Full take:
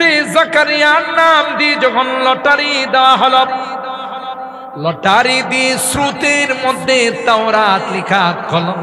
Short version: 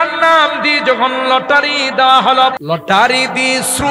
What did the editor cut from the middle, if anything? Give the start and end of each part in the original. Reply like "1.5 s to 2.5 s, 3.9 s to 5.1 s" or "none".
3.5 s to 4.7 s